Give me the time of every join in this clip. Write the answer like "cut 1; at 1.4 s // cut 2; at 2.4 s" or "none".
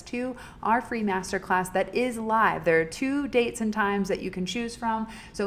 none